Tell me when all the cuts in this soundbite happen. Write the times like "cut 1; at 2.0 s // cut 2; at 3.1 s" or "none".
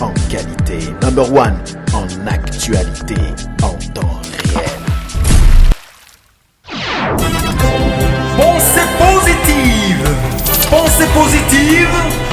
cut 1; at 5.8 s